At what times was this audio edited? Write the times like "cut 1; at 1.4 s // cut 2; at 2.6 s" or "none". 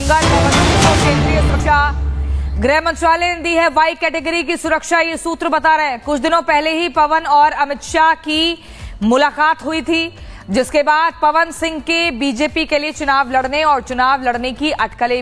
cut 1; at 1.5 s